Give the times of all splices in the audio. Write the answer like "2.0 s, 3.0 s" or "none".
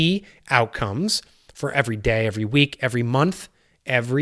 none

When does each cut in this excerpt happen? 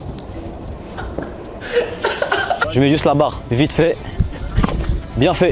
0.9 s, 2.6 s

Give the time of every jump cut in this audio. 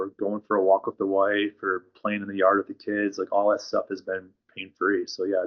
none

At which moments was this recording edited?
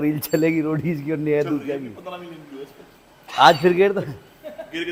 none

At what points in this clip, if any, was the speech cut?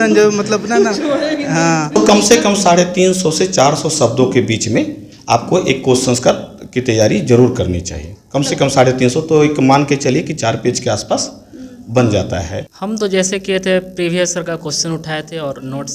1.9 s, 12.7 s

